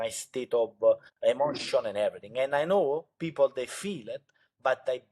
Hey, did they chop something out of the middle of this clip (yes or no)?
yes